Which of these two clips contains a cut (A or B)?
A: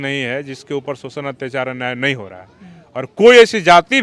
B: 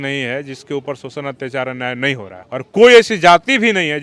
B